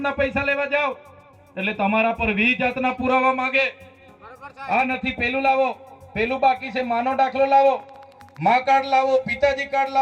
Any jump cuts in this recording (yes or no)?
no